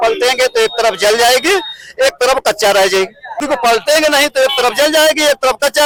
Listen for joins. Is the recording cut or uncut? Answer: uncut